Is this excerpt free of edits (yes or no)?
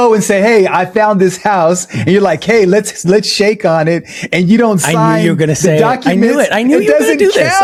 yes